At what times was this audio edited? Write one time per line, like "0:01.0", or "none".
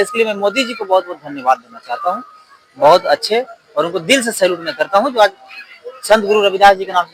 none